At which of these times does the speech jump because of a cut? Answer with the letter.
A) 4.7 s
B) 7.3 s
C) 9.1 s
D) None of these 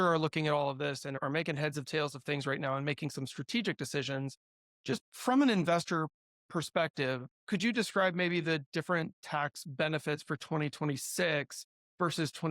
B